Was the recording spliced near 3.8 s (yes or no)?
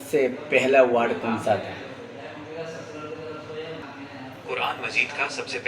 yes